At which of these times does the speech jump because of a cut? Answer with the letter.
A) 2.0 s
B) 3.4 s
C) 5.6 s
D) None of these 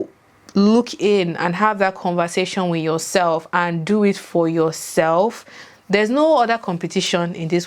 D